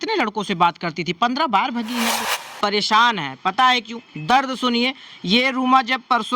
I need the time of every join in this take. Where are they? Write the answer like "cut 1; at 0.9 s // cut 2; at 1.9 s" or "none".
cut 1; at 2.3 s